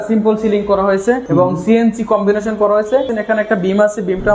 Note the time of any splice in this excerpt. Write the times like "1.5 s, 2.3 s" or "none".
1.2 s, 3.1 s